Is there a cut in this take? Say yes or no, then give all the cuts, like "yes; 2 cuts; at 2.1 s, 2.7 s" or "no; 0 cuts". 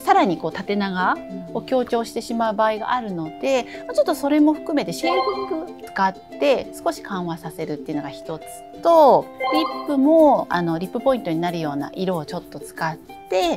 yes; 2 cuts; at 5.9 s, 9.3 s